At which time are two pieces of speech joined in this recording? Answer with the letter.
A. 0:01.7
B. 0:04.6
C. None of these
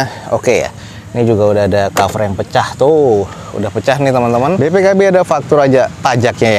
B